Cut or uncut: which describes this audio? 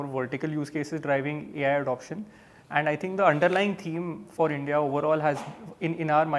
uncut